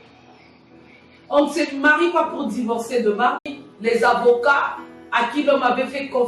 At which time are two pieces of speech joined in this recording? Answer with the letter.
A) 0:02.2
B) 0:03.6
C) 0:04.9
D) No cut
B